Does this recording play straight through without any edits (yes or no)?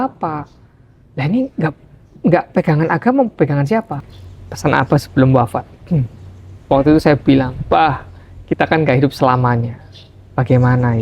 no